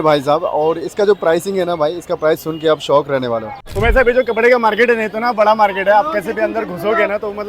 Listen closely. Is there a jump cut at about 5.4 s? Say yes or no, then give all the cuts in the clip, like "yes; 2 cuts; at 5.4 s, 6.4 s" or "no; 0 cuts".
no; 1 cut; at 3.6 s